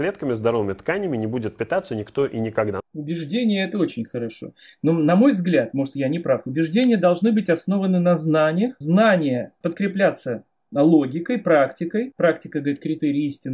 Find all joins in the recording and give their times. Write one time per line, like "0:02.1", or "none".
0:08.8
0:09.5
0:12.1